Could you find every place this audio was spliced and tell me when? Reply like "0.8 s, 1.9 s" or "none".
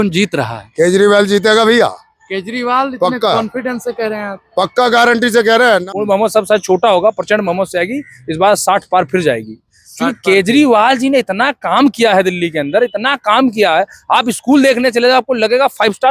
5.8 s